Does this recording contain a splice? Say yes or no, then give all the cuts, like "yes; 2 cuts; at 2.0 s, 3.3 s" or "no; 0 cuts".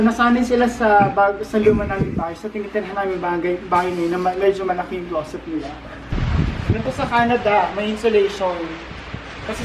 yes; 1 cut; at 6.2 s